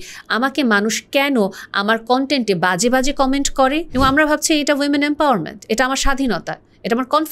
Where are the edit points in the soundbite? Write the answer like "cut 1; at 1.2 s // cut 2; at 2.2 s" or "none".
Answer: cut 1; at 3.9 s